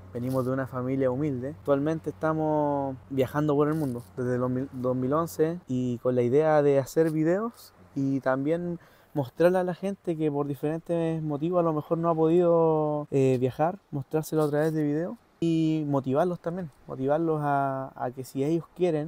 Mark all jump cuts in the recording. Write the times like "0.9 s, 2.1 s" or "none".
1.6 s, 3.0 s, 5.6 s, 13.0 s, 15.4 s